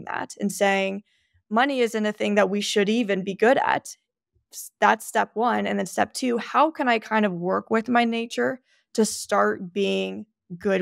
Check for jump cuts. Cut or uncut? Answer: uncut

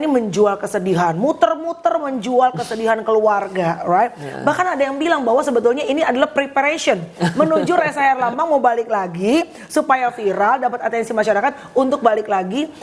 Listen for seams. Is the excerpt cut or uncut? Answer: uncut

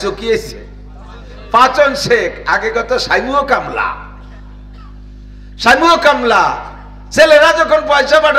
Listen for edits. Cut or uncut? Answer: uncut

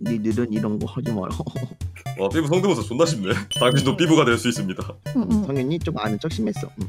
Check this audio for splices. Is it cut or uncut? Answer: uncut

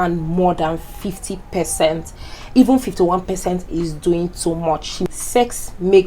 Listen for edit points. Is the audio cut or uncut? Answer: cut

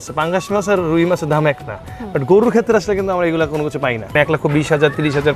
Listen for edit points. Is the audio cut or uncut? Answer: cut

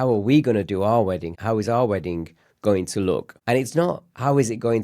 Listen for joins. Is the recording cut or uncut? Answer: cut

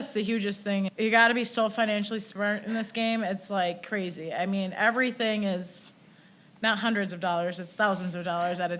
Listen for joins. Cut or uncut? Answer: cut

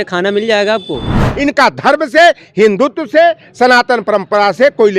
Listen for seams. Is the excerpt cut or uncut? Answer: cut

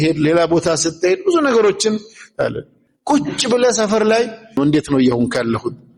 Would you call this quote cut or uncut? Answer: cut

